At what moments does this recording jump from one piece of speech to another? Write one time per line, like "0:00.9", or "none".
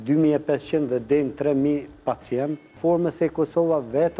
0:02.7